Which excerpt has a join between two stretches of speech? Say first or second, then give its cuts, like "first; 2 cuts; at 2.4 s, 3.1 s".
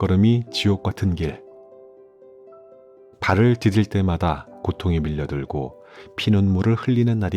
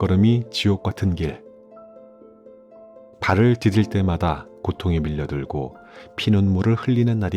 second; 2 cuts; at 1.4 s, 3.1 s